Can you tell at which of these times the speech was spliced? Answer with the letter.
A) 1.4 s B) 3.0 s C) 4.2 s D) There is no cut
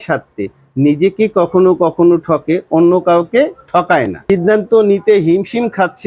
C